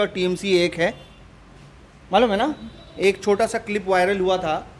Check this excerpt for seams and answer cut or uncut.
uncut